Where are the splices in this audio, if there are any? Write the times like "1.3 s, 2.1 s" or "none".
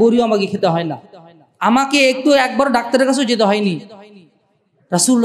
none